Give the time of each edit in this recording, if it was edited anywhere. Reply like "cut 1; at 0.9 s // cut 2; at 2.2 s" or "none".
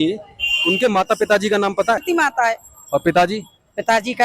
cut 1; at 2.0 s